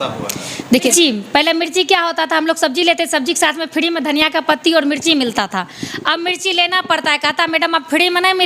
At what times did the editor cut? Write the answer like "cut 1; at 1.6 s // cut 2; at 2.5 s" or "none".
cut 1; at 0.9 s